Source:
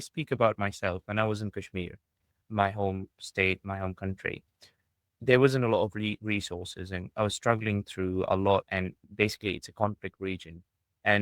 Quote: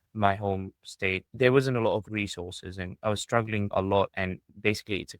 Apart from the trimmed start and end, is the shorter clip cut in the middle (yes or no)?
yes